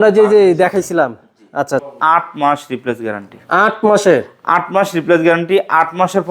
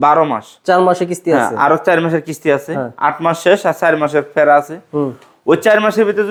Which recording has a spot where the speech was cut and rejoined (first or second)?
first